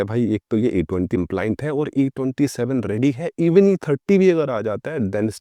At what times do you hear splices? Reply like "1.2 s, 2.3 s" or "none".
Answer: none